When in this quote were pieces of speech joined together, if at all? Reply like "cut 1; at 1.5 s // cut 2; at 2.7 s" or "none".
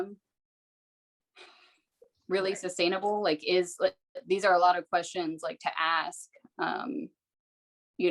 none